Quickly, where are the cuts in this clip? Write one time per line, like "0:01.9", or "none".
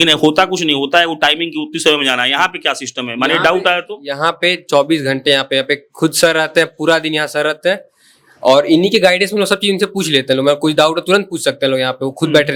none